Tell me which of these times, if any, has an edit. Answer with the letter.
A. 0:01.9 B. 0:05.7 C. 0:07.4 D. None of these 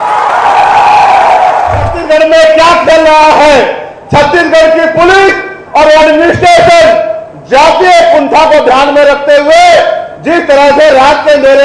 A